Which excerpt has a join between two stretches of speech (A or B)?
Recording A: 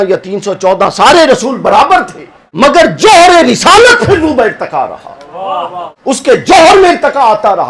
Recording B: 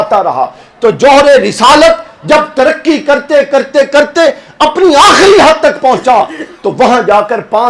A